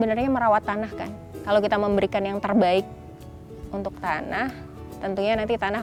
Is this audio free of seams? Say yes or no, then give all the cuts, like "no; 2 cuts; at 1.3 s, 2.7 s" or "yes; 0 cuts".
yes; 0 cuts